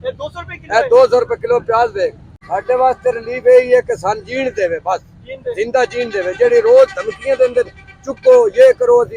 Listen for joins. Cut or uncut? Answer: uncut